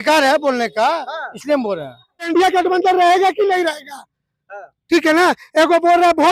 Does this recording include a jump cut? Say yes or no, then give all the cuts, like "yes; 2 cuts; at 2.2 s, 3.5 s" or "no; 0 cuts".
yes; 1 cut; at 2.3 s